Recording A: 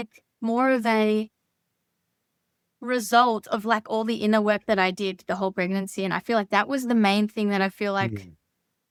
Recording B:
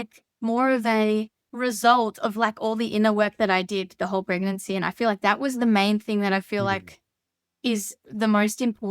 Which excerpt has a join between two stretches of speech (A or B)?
B